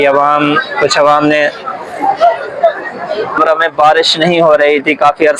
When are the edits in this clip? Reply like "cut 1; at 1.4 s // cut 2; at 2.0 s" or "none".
cut 1; at 3.4 s